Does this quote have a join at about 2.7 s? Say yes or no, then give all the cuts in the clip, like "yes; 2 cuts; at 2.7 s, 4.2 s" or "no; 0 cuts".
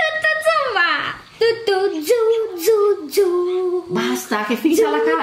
no; 1 cut; at 1.2 s